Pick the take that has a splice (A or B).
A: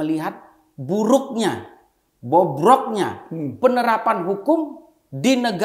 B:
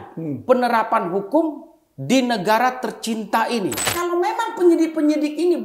B